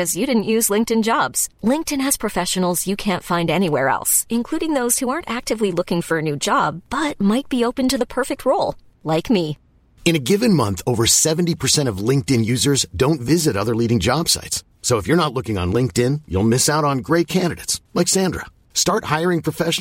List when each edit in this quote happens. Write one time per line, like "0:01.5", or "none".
none